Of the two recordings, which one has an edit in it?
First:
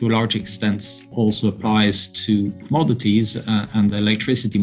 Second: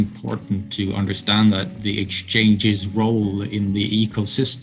first; 2 cuts; at 1.0 s, 2.6 s

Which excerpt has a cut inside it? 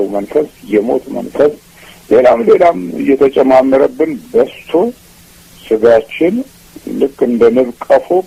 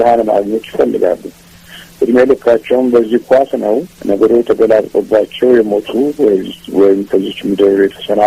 second; 1 cut; at 3.9 s

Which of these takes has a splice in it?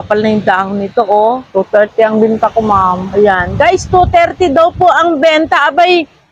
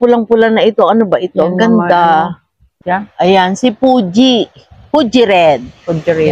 second; 1 cut; at 2.7 s

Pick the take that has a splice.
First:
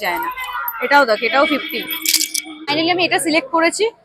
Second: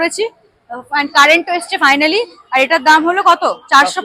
first; 1 cut; at 2.7 s

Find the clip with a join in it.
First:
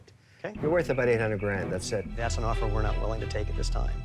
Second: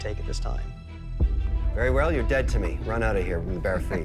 first; 1 cut; at 2.1 s

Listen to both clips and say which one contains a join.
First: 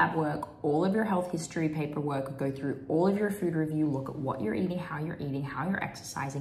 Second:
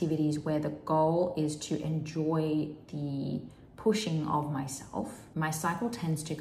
second; 1 cut; at 5.2 s

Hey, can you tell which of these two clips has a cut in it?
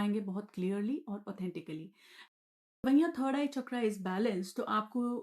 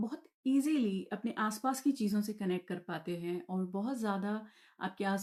first; 1 cut; at 2.2 s

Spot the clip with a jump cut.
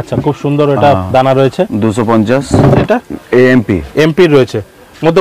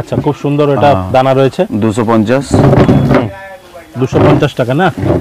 first; 1 cut; at 2.8 s

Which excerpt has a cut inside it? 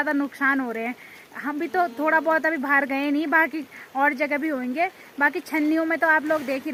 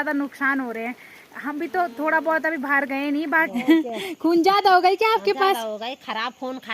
second; 1 cut; at 3.5 s

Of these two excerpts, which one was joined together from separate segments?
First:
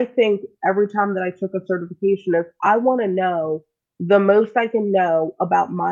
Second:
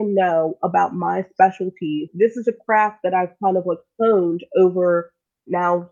second; 1 cut; at 2.1 s

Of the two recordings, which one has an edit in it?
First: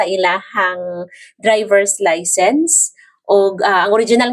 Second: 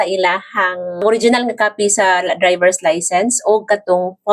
second; 1 cut; at 1.0 s

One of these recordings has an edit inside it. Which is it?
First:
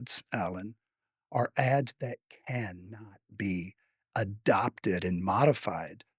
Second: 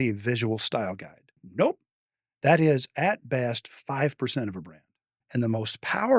second; 2 cuts; at 1.4 s, 5.2 s

